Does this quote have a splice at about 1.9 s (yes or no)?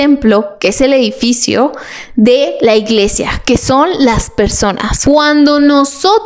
no